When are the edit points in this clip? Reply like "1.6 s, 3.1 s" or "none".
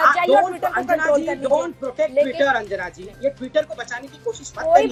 none